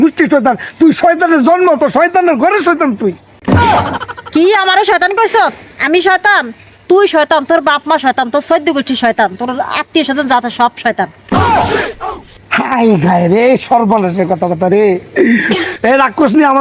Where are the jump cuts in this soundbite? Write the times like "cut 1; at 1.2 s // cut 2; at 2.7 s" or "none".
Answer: cut 1; at 15.6 s

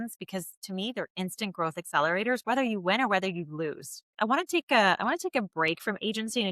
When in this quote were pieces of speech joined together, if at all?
cut 1; at 4.1 s

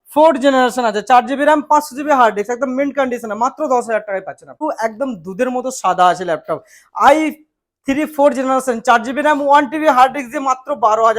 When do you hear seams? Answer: cut 1; at 4.6 s

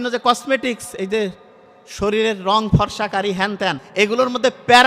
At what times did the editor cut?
cut 1; at 3.8 s

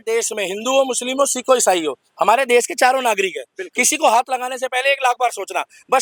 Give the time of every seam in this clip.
none

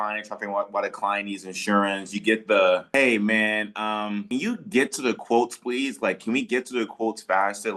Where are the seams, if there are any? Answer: cut 1; at 2.9 s // cut 2; at 4.2 s

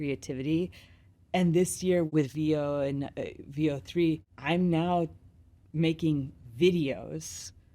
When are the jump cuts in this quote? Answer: cut 1; at 2.1 s // cut 2; at 4.3 s

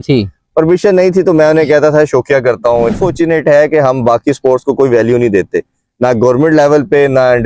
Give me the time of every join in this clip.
cut 1; at 2.9 s

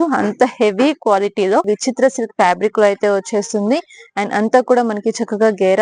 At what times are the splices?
cut 1; at 1.7 s

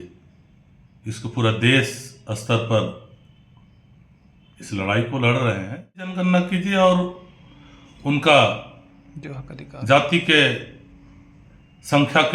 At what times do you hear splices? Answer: cut 1; at 6.1 s

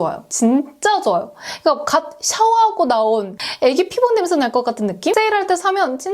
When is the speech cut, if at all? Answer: cut 1; at 3.4 s // cut 2; at 5.1 s

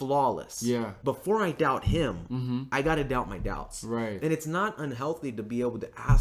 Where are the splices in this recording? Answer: cut 1; at 0.9 s

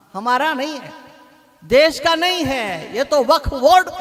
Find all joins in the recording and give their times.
none

